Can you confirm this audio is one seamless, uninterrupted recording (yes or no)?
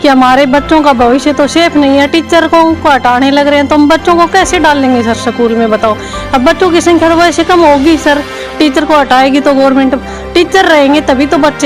yes